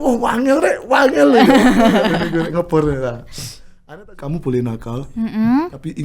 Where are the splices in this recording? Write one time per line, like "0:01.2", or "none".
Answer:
0:03.8